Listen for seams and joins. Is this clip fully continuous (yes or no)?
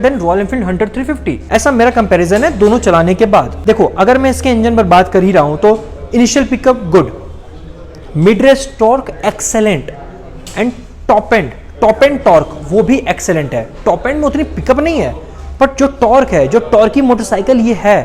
yes